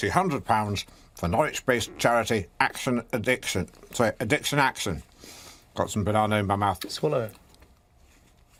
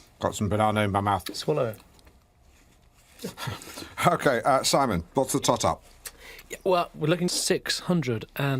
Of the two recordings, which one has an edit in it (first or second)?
second